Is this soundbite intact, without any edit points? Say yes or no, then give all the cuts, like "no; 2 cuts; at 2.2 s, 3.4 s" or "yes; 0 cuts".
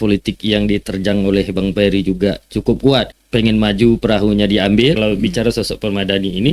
no; 2 cuts; at 3.2 s, 5.0 s